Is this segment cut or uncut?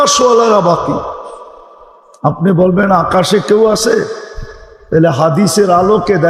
uncut